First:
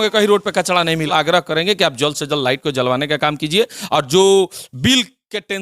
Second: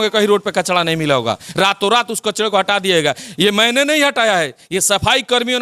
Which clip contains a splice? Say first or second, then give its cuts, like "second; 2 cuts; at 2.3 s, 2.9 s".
first; 1 cut; at 1.1 s